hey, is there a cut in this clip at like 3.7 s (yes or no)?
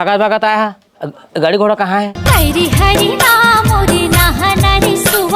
no